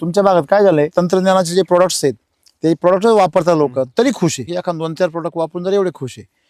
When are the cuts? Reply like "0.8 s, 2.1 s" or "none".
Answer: 0.9 s, 4.5 s